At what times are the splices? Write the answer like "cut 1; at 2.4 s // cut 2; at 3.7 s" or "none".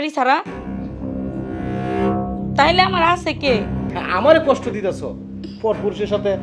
cut 1; at 3.9 s